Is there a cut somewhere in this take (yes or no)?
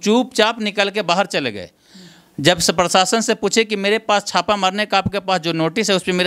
no